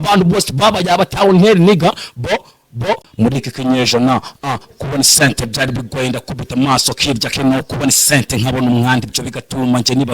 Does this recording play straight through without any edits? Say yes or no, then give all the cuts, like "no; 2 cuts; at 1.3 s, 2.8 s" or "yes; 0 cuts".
no; 1 cut; at 3.1 s